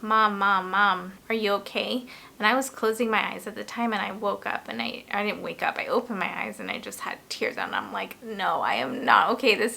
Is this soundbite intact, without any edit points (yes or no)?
yes